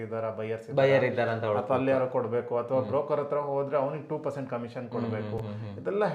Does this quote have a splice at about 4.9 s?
no; 0 cuts

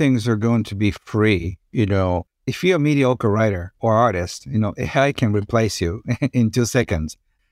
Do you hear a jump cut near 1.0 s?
no; 0 cuts

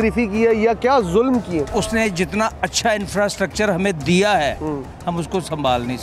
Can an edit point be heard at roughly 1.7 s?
yes; 1 cut; at 1.7 s

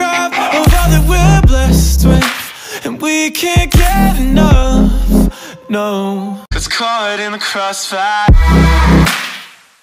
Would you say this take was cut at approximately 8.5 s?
no; 1 cut; at 6.6 s

